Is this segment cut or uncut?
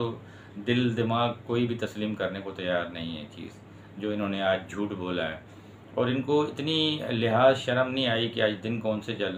uncut